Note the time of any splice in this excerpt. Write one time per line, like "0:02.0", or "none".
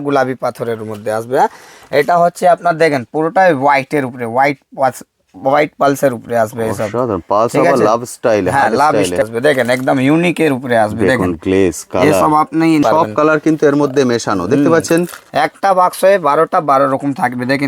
0:09.2
0:12.8